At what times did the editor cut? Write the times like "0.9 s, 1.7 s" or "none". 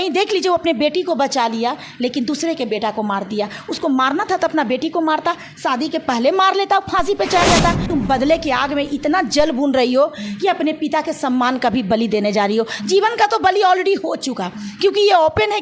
7.9 s